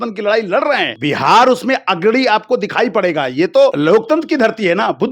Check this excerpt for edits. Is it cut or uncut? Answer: cut